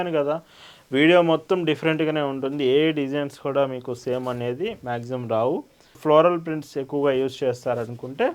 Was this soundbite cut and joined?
yes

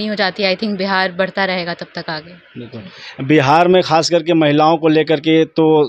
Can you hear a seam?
no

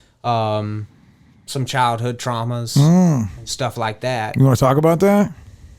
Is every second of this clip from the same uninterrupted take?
yes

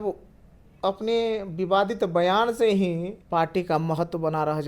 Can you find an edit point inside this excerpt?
yes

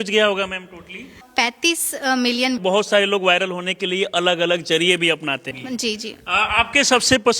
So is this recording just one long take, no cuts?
no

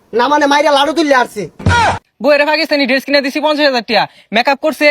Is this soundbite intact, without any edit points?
no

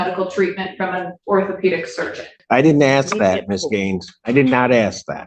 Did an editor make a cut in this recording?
yes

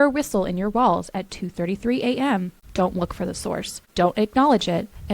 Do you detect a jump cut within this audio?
yes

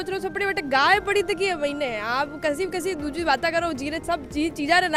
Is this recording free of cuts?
yes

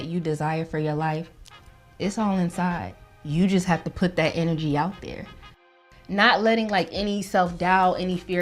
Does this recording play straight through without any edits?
no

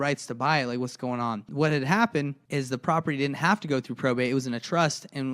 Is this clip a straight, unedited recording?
no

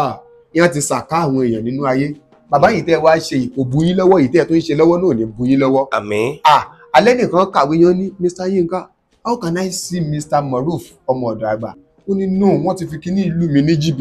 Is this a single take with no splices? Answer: no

